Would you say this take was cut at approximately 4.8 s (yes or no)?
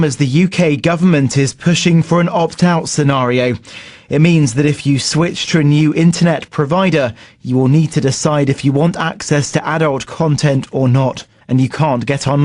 yes